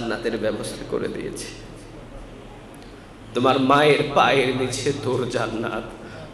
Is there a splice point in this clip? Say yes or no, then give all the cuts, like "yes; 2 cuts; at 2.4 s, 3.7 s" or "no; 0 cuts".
no; 0 cuts